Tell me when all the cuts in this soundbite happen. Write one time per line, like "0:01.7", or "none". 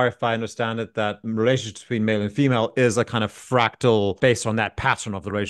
0:01.2
0:04.2